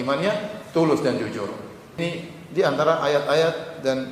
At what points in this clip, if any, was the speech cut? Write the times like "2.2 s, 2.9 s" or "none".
1.9 s